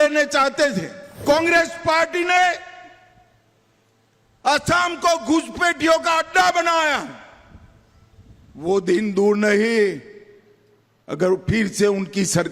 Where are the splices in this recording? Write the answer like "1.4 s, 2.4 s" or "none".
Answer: 1.2 s

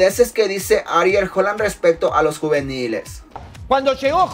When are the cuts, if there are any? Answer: 3.3 s

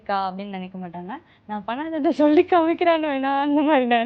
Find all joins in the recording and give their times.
1.3 s

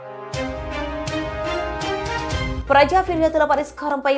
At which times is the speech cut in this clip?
2.6 s

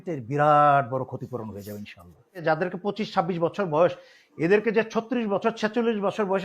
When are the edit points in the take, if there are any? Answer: 2.4 s

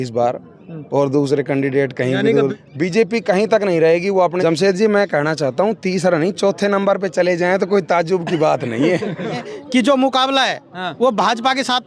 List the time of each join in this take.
2.5 s, 4.4 s, 9.5 s

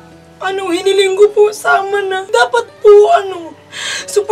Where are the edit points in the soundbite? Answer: 2.2 s

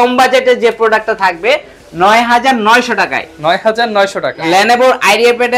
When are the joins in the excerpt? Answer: 4.4 s

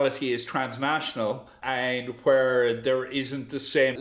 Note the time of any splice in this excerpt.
none

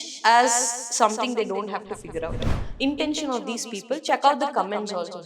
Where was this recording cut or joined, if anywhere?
2.5 s

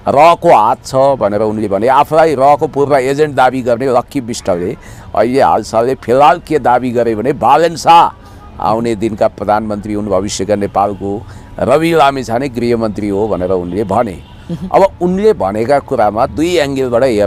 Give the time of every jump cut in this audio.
none

